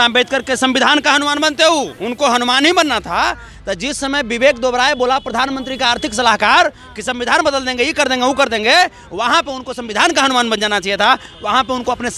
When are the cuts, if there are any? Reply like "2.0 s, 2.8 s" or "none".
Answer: 2.0 s